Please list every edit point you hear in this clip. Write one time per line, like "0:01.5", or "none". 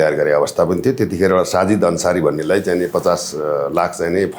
none